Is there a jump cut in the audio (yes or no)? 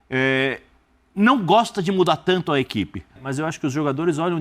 yes